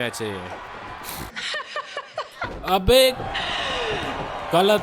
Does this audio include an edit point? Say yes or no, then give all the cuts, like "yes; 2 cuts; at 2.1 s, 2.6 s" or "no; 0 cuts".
yes; 1 cut; at 1.3 s